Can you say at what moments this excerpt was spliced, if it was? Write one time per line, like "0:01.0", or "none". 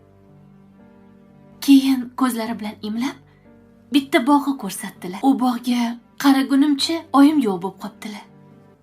0:01.5